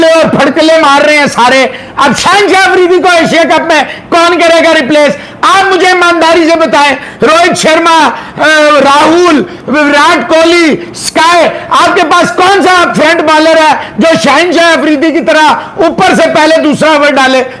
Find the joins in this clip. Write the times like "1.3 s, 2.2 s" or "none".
none